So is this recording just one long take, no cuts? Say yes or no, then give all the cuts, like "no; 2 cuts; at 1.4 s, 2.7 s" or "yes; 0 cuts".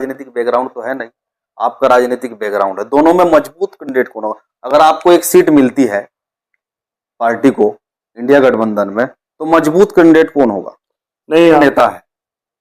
no; 1 cut; at 11.6 s